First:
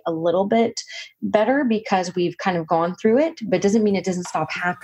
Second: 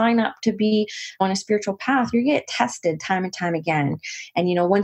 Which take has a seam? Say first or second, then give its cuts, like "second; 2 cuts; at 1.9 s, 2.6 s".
second; 1 cut; at 1.2 s